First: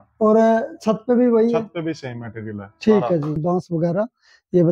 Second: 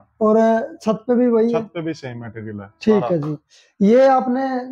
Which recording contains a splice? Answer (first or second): first